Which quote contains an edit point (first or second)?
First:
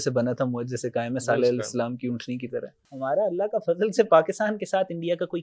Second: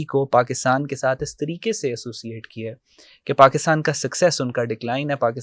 first